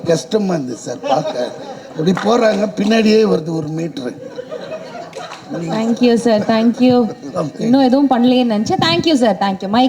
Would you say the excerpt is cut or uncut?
uncut